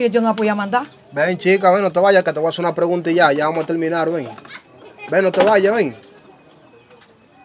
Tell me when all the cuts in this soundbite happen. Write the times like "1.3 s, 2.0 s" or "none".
none

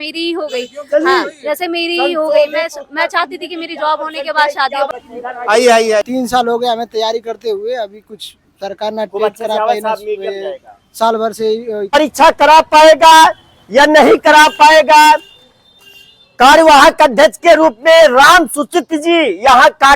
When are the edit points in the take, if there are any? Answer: 4.9 s, 11.9 s

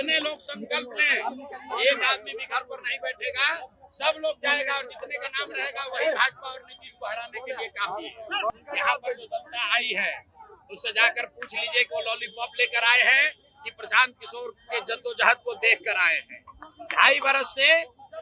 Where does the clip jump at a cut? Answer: 8.5 s

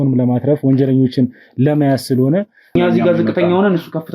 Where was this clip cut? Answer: 2.8 s

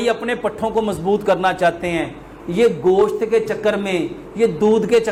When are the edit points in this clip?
none

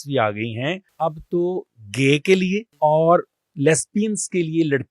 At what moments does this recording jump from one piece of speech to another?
0.9 s, 2.7 s

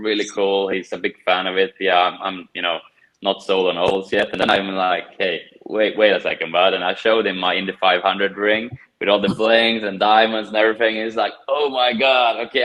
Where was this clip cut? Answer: none

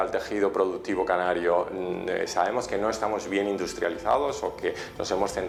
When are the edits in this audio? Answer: none

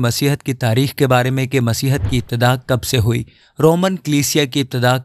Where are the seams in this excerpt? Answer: none

